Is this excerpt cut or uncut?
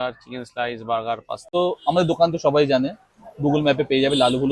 cut